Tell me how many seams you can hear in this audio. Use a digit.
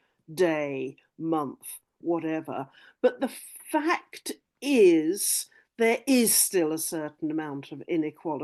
0